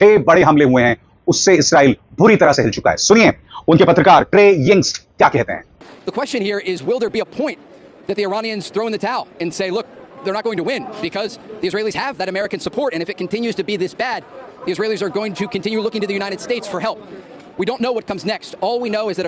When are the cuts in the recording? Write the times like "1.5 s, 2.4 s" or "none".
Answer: none